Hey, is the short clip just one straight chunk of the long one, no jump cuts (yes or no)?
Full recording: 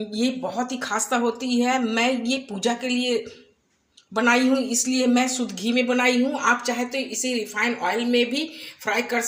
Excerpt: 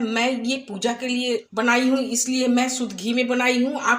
no